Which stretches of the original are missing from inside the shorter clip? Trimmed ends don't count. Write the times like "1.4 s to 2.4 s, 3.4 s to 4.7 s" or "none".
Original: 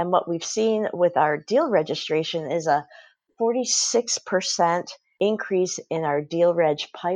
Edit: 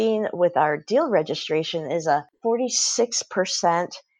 2.9 s to 3.3 s